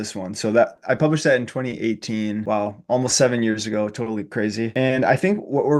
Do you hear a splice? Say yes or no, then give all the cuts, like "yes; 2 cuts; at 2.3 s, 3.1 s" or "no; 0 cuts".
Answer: yes; 2 cuts; at 2.4 s, 4.7 s